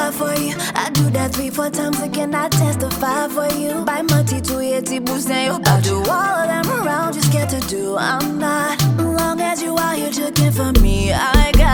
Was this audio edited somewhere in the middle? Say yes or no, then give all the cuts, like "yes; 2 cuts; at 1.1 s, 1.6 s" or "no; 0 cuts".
no; 0 cuts